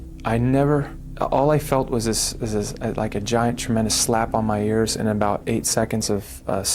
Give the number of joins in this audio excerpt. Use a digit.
1